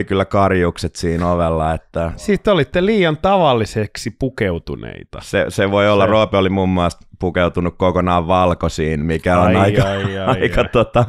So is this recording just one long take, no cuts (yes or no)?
no